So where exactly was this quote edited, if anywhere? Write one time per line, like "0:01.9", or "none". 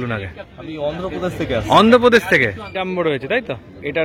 0:02.6